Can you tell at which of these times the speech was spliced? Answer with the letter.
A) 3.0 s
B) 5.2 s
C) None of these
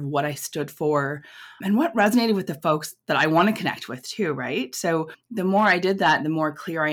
B